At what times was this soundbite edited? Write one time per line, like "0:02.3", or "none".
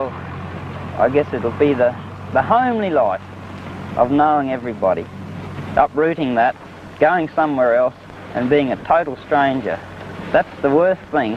none